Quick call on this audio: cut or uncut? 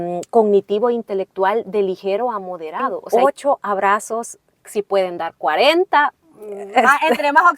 cut